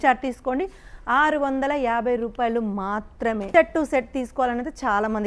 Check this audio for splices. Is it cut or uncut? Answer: cut